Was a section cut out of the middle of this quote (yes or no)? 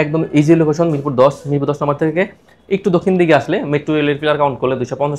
no